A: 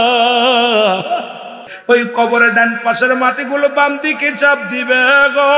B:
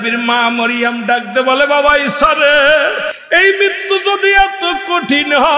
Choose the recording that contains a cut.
A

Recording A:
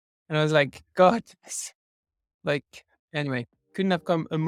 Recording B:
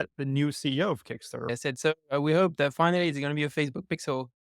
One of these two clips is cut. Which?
B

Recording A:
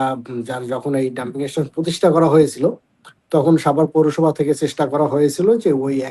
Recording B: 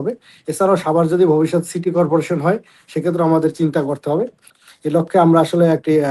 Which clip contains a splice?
B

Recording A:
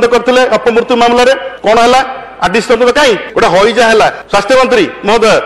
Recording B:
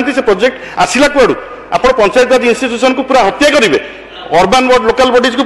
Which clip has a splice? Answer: A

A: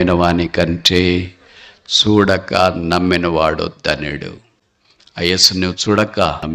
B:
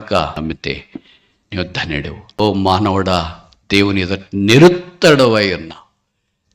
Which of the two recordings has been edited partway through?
B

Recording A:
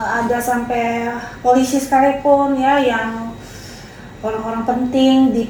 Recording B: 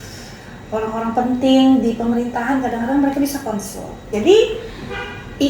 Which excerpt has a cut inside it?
B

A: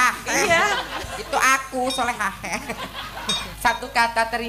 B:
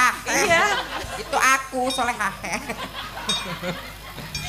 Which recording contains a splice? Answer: A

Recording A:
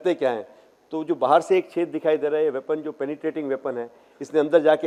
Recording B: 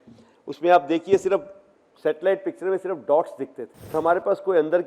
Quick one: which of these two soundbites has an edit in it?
B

